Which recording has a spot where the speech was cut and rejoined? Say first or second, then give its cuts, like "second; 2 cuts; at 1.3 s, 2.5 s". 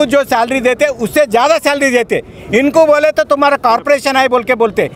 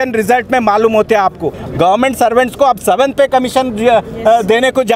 second; 1 cut; at 1.6 s